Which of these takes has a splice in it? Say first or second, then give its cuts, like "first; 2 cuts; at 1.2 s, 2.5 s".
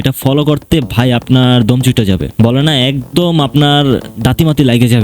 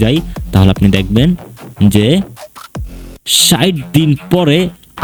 first; 1 cut; at 2.3 s